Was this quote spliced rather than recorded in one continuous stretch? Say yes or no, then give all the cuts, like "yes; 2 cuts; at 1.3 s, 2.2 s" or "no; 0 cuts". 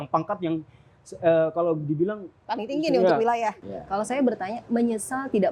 yes; 1 cut; at 3.6 s